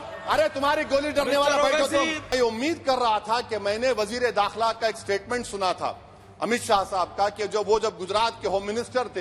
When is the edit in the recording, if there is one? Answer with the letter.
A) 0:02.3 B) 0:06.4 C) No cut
A